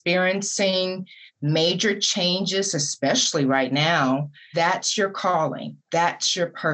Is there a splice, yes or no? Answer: yes